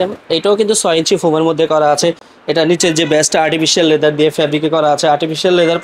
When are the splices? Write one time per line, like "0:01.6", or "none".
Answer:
none